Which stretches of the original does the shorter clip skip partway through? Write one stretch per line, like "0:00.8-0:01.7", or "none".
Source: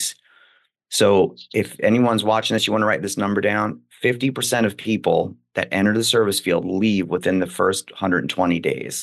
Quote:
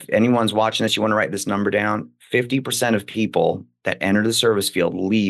none